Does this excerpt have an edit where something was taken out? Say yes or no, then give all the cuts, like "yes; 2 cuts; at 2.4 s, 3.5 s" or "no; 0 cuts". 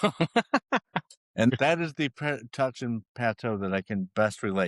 yes; 1 cut; at 1.4 s